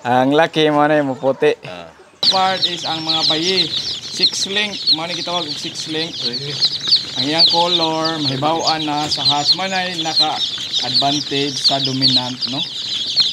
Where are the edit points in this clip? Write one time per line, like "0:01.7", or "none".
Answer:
0:02.3